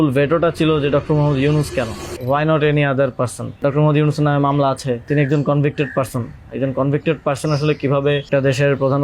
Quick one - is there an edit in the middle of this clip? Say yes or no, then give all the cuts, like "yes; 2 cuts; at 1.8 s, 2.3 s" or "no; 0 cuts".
yes; 4 cuts; at 2.1 s, 3.6 s, 5.1 s, 8.3 s